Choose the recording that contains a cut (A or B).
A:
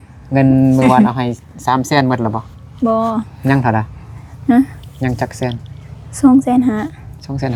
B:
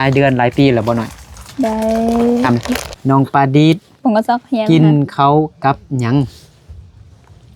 B